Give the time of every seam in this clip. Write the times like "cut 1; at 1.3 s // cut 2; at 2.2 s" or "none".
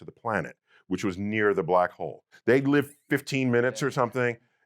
cut 1; at 2.2 s